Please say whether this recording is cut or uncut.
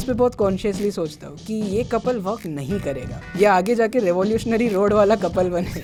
uncut